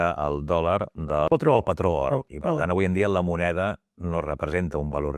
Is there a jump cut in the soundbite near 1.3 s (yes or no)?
yes